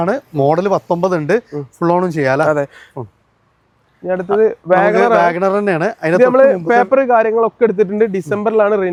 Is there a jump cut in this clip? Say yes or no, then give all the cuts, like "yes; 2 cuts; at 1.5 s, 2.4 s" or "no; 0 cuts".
no; 0 cuts